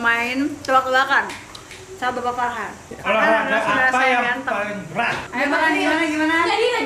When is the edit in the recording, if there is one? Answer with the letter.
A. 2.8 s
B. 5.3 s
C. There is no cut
C